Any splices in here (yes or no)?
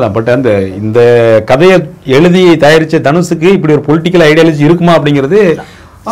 no